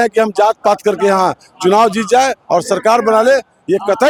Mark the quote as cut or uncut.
uncut